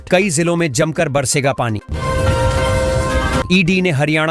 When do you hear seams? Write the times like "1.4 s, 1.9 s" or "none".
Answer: 1.9 s, 3.5 s

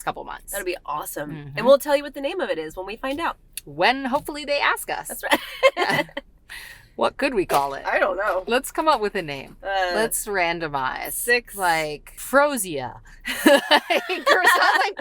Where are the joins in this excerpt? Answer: 12.1 s

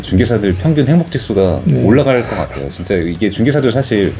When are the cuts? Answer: none

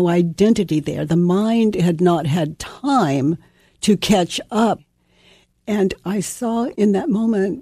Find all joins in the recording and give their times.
4.9 s, 6.7 s

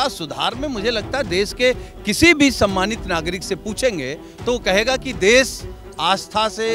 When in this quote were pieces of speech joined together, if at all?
none

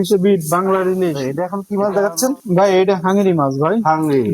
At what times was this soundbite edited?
1.3 s

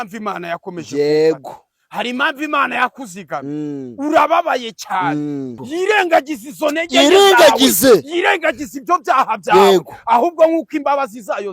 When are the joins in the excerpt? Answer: 5.6 s

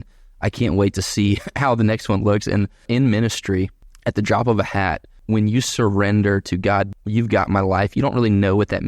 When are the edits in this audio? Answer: 2.8 s, 3.8 s, 5.2 s, 6.9 s

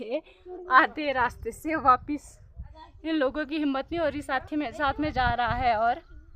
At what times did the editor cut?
none

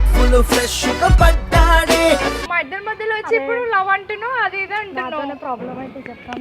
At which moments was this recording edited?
2.4 s

